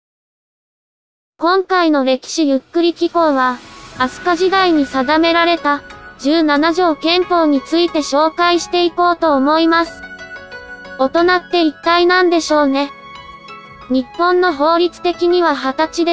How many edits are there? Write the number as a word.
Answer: one